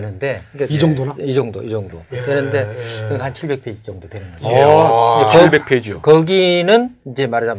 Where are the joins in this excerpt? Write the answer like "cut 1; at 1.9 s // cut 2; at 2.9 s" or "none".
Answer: none